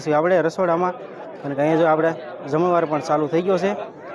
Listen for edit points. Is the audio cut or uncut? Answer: uncut